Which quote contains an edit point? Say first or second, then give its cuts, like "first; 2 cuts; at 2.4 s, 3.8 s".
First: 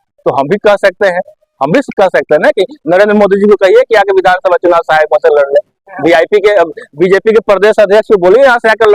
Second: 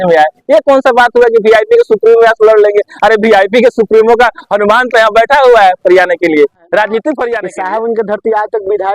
second; 1 cut; at 7.4 s